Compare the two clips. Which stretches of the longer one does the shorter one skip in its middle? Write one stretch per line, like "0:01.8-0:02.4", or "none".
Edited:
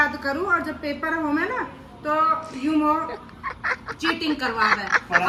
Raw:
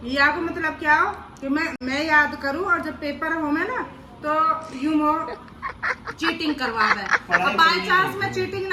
none